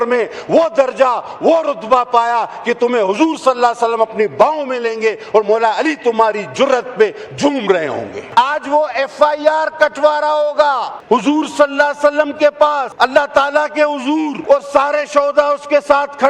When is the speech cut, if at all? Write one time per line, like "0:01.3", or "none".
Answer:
0:08.2
0:10.9
0:12.9
0:14.4